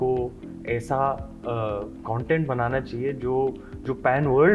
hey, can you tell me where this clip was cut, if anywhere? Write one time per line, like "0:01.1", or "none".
none

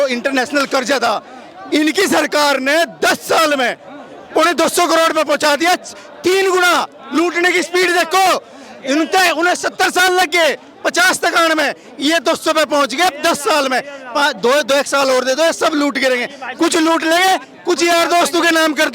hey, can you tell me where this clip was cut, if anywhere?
none

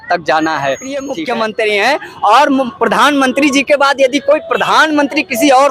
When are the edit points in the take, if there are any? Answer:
0:01.1

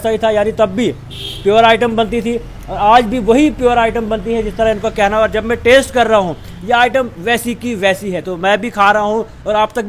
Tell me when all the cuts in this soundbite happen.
none

